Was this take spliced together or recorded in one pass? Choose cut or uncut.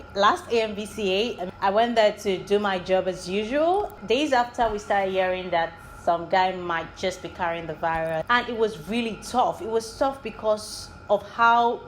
cut